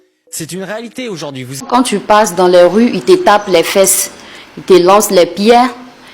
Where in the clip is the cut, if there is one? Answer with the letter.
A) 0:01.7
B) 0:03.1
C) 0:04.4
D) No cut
A